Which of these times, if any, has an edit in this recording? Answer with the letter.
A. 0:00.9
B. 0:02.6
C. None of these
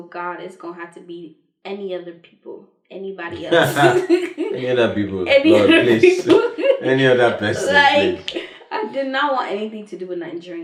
C